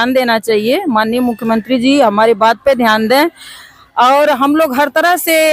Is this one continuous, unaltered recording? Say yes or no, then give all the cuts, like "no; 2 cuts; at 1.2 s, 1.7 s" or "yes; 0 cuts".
yes; 0 cuts